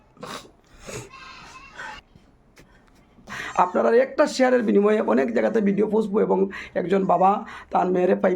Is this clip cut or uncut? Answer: cut